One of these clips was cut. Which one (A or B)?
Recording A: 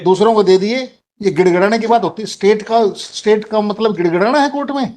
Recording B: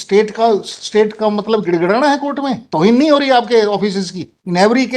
A